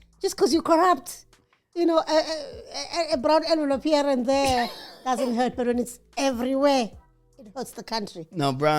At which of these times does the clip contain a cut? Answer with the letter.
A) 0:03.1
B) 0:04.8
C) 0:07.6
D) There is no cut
D